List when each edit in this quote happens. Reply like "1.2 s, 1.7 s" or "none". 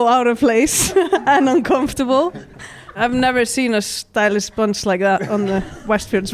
2.9 s